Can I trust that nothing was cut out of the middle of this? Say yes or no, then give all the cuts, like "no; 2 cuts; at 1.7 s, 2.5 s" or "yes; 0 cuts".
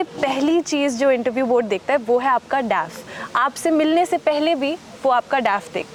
yes; 0 cuts